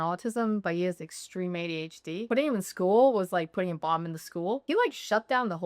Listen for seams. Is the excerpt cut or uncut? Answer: cut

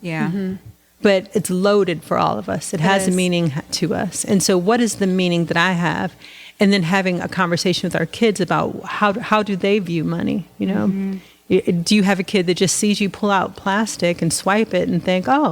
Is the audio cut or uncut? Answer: cut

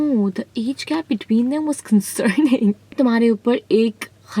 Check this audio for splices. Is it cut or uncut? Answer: cut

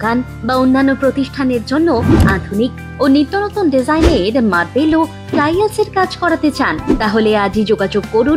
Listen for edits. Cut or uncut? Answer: uncut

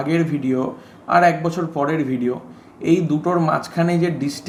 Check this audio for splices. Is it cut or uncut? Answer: uncut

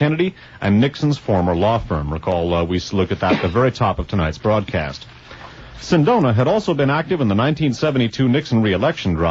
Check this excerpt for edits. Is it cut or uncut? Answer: cut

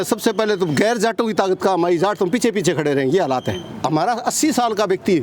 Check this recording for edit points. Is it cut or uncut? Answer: cut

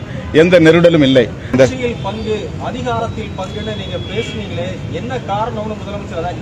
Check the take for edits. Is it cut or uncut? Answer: cut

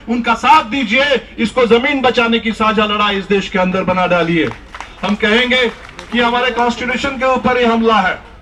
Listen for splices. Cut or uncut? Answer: uncut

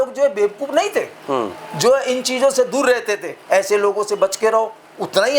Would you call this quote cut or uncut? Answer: cut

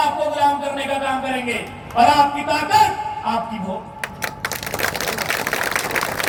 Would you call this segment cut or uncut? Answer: uncut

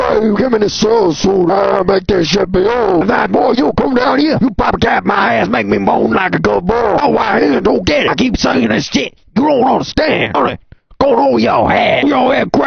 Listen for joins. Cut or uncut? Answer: uncut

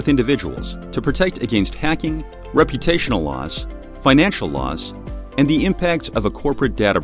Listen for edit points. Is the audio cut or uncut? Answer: uncut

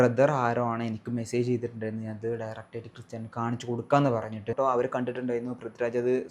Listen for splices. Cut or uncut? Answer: cut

